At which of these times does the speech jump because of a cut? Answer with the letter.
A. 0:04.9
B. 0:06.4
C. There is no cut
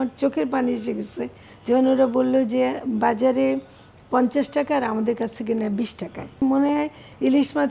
B